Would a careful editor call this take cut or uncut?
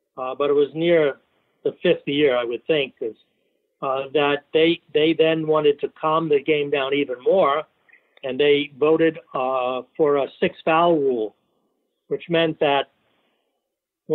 uncut